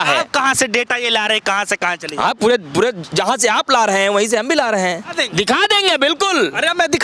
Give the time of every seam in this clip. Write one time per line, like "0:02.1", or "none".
0:05.1